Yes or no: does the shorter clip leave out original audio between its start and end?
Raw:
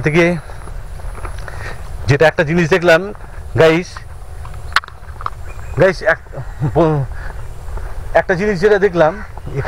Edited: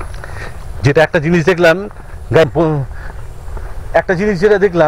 yes